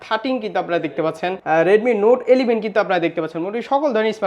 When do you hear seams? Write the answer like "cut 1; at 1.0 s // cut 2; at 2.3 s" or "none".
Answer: cut 1; at 1.4 s